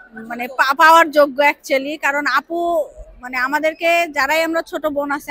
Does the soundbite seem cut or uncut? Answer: uncut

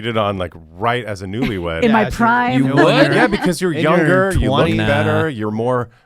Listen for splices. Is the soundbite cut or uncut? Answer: uncut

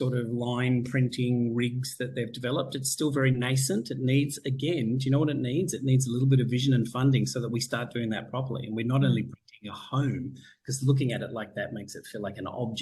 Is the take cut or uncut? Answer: uncut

